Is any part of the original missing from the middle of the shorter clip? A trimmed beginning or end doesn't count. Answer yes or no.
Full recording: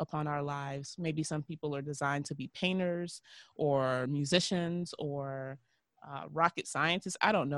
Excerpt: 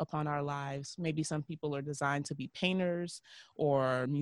no